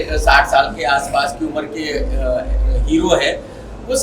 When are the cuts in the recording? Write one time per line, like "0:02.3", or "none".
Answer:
none

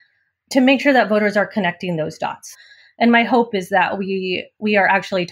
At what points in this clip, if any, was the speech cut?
0:02.5

